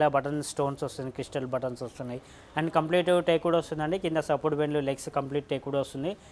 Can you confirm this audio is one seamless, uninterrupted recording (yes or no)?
yes